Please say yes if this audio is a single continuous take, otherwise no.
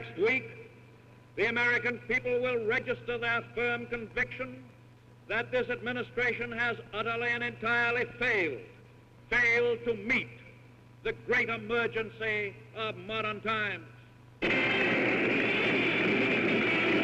yes